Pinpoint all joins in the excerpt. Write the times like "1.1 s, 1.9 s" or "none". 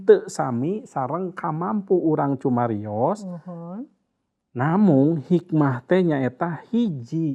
none